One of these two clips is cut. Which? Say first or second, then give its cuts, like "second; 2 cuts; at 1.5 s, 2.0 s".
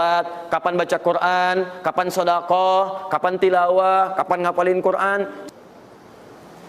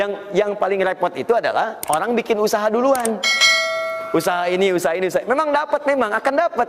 first; 1 cut; at 5.4 s